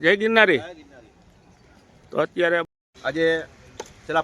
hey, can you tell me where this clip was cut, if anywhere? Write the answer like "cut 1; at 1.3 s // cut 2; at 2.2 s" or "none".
cut 1; at 2.6 s